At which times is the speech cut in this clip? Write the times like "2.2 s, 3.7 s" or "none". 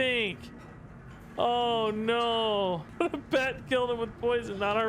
2.9 s